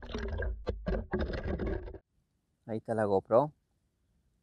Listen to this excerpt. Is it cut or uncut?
cut